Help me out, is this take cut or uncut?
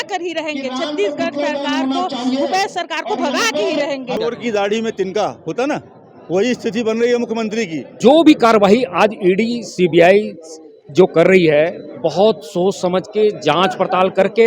cut